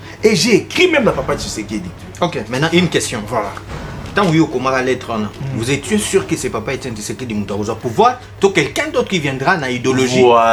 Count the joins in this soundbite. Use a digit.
1